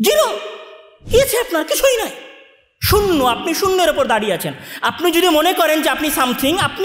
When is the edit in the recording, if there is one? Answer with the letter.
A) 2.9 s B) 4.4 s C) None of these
C